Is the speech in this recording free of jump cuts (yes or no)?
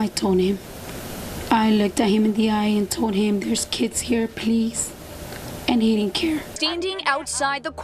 no